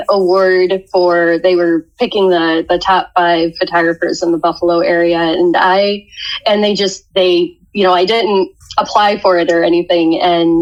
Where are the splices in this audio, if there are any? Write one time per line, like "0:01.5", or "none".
none